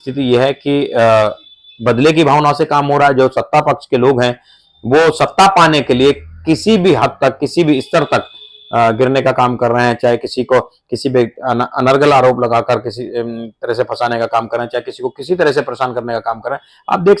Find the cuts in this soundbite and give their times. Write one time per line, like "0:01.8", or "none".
none

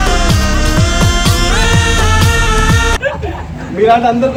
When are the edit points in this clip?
none

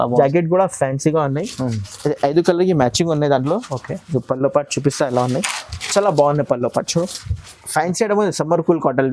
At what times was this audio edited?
0:07.6

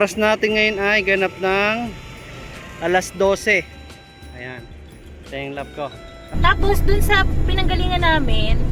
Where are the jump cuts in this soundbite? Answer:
0:06.3

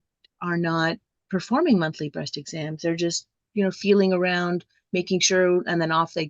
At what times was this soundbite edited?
0:01.1

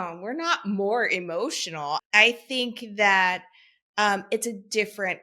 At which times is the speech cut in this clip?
0:02.0

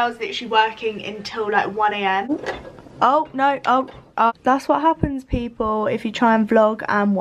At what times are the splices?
0:02.3
0:04.3

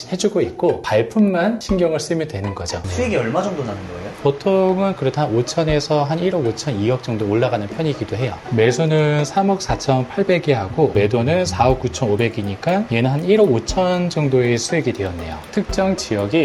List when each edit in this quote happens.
0:00.8
0:02.8
0:04.2
0:08.4
0:15.4

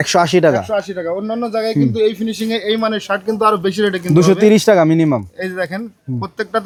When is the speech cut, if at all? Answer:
none

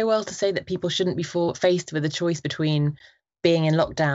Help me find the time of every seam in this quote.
none

